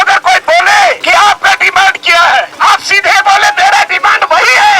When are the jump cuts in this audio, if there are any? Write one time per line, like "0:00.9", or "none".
0:01.0
0:02.5

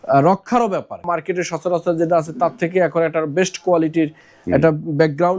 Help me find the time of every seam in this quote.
0:01.0

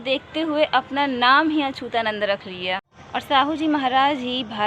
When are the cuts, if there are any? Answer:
0:03.0

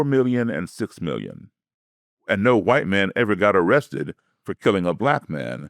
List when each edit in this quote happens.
0:02.2

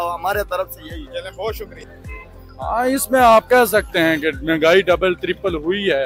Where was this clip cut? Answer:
0:01.9

